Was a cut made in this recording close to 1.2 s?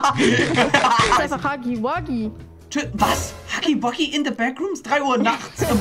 yes; 1 cut; at 1.2 s

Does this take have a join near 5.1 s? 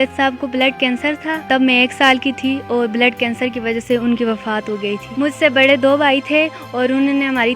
yes; 2 cuts; at 1.4 s, 5.1 s

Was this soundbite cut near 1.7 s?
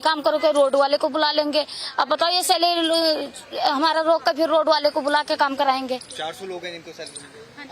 no; 0 cuts

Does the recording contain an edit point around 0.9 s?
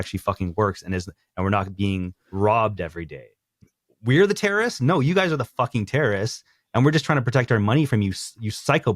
no; 1 cut; at 3.6 s

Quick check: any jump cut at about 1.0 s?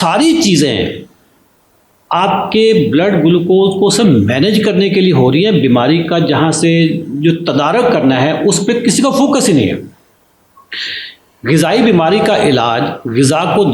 no; 0 cuts

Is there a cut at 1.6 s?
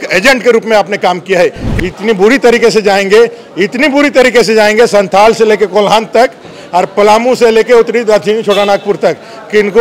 yes; 1 cut; at 1.6 s

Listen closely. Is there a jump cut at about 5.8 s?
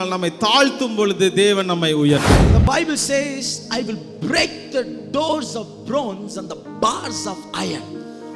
no; 1 cut; at 2.4 s

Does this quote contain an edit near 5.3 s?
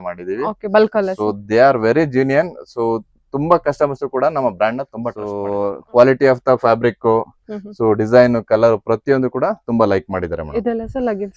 yes; 1 cut; at 5.3 s

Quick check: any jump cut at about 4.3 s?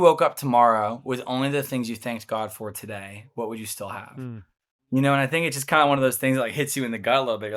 no; 0 cuts

